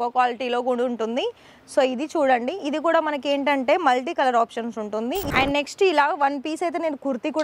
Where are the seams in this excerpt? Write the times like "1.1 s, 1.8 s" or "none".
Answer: 5.3 s